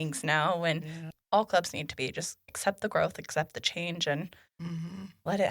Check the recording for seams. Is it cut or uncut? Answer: cut